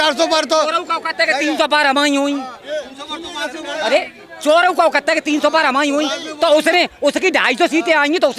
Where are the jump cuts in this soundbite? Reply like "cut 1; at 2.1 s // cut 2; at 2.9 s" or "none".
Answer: cut 1; at 2.6 s

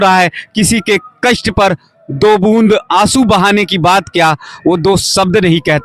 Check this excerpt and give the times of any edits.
none

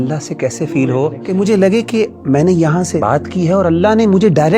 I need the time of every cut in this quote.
cut 1; at 1.2 s // cut 2; at 3.0 s

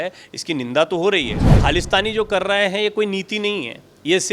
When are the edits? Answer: cut 1; at 1.4 s

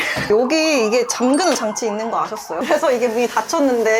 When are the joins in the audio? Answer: cut 1; at 2.5 s

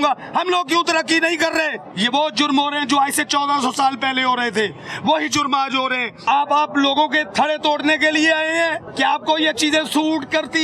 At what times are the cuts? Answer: cut 1; at 1.8 s // cut 2; at 6.2 s // cut 3; at 8.9 s

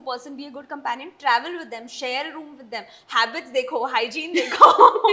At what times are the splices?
none

